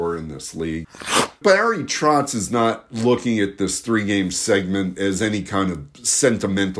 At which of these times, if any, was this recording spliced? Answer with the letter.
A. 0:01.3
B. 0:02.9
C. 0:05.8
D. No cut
A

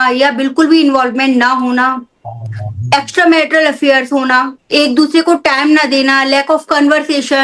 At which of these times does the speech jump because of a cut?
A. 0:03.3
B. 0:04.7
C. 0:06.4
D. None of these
D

